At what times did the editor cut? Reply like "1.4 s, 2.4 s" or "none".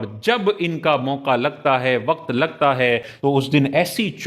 3.1 s